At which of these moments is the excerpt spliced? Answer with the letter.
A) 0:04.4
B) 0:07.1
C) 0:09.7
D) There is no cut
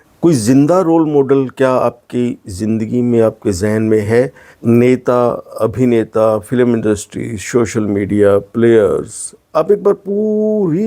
A